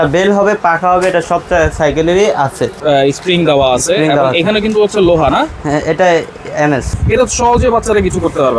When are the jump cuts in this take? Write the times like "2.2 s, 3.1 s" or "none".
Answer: 2.8 s, 6.9 s